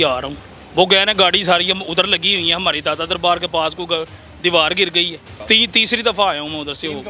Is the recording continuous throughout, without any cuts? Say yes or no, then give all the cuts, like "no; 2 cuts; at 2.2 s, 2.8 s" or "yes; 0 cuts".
no; 1 cut; at 5.3 s